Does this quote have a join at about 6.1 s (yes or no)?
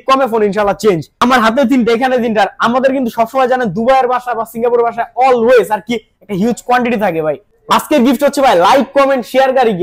no